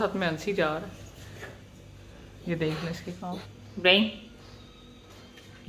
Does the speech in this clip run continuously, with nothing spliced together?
yes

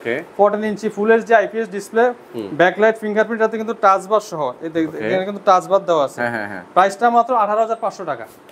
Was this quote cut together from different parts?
no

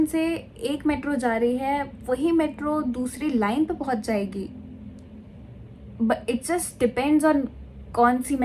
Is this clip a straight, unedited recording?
yes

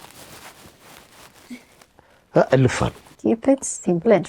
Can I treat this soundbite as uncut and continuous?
no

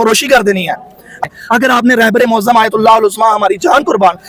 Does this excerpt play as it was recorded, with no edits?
no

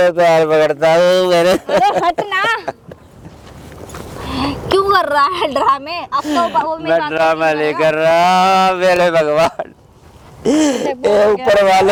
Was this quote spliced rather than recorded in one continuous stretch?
no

